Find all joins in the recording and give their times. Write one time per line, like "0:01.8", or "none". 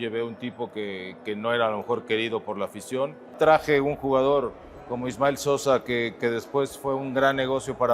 0:03.3

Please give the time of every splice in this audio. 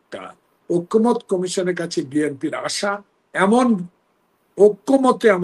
none

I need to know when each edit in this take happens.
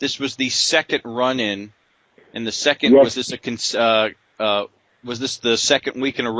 0:01.3

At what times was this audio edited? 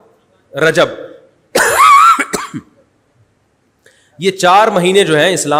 none

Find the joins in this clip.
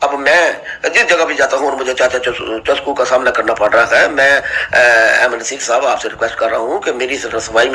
none

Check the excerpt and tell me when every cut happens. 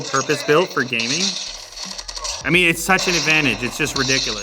0:02.4

